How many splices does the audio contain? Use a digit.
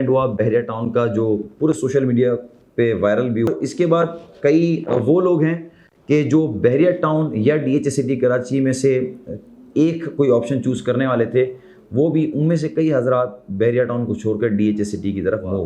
1